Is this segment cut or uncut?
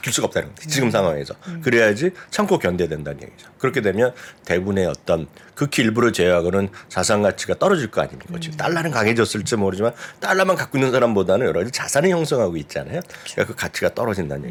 uncut